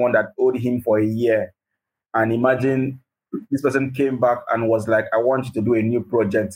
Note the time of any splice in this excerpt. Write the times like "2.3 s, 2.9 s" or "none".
none